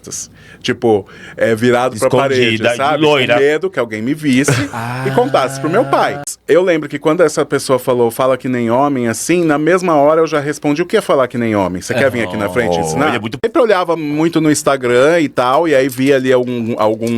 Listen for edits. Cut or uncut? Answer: cut